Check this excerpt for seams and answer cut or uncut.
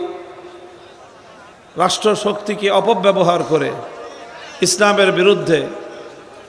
uncut